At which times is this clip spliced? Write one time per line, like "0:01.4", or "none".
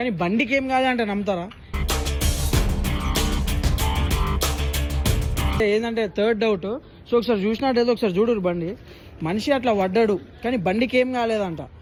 none

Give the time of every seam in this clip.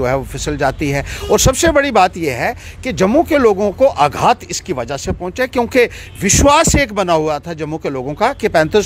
none

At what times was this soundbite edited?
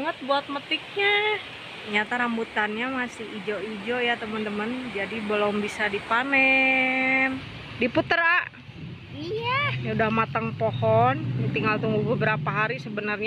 0:01.9
0:07.6

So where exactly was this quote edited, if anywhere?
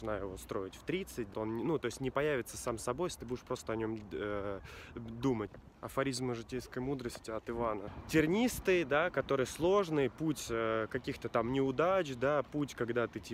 0:01.3
0:05.5
0:07.9

